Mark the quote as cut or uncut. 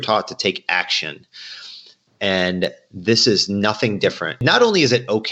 cut